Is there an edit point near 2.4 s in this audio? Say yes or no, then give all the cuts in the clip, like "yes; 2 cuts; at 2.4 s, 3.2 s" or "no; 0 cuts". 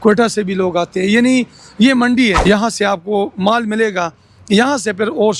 yes; 1 cut; at 2.4 s